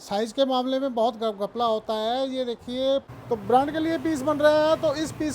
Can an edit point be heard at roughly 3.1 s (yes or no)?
yes